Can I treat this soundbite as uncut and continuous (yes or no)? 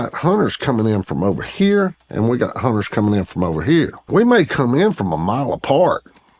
no